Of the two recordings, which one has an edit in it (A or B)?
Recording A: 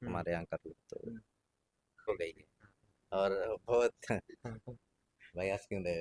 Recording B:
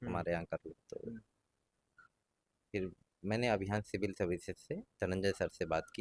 A